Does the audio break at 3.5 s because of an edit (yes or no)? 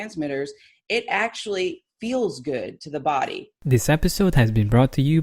yes